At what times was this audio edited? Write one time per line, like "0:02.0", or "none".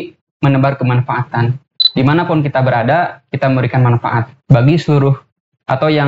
0:01.8